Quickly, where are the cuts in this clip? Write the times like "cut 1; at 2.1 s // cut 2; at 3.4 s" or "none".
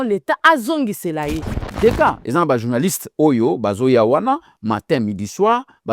cut 1; at 1.6 s